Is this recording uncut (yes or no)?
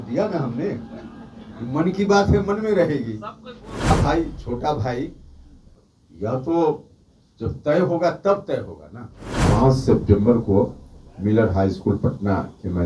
no